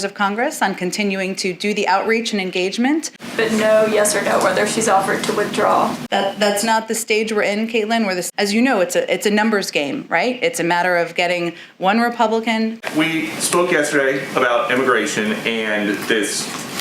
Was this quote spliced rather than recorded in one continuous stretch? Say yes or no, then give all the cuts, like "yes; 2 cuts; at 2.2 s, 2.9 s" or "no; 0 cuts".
yes; 3 cuts; at 3.2 s, 8.2 s, 12.8 s